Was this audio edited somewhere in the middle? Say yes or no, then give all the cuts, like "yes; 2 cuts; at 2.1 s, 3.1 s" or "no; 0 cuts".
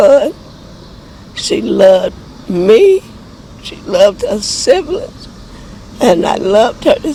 no; 0 cuts